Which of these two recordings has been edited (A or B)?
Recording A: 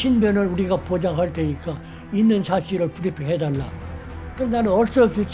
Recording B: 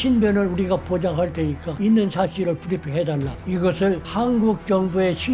B